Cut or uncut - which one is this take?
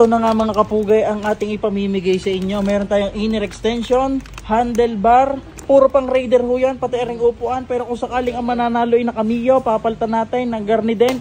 uncut